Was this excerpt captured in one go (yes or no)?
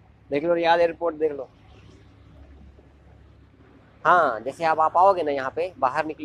yes